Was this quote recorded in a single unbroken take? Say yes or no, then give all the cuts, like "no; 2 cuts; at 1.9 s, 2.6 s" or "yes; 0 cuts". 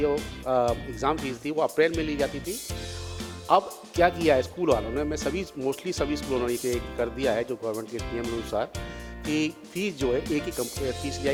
yes; 0 cuts